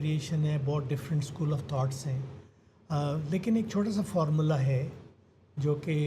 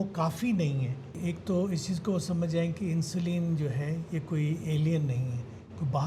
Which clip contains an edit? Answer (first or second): second